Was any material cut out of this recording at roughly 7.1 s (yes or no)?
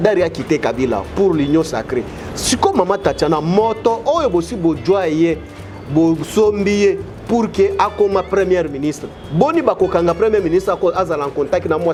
no